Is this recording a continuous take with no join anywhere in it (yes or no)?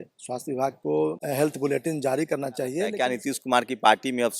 no